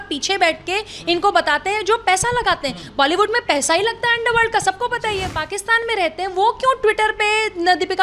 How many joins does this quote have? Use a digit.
1